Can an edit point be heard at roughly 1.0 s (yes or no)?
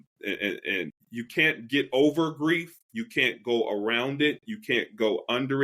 yes